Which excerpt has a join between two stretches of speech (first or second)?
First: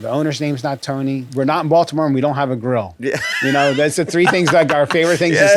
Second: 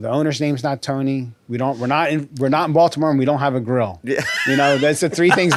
first